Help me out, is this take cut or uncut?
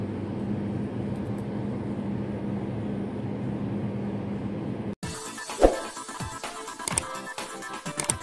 cut